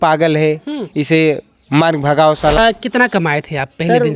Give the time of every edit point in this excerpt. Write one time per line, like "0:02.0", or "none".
0:02.6